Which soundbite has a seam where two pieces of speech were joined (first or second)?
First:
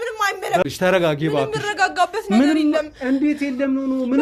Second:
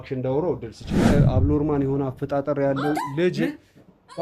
second